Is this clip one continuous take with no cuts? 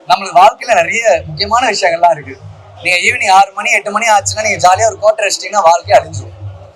yes; 0 cuts

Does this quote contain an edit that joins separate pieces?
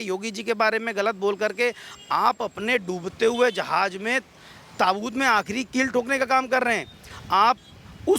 no; 0 cuts

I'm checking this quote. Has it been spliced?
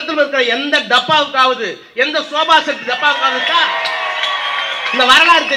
no; 0 cuts

